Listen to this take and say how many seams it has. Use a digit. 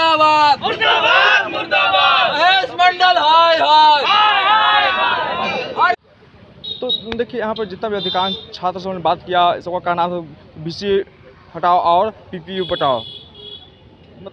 0